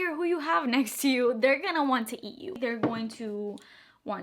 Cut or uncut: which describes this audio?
cut